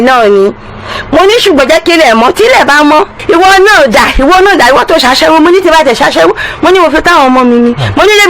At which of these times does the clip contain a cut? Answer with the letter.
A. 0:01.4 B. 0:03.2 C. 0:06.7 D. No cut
B